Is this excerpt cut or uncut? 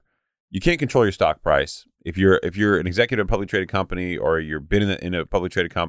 uncut